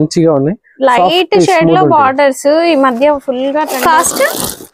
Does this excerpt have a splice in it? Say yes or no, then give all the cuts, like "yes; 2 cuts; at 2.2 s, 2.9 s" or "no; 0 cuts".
yes; 1 cut; at 3.7 s